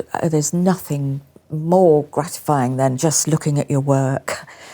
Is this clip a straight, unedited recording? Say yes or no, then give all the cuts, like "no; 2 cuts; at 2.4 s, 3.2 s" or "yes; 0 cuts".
no; 1 cut; at 3.0 s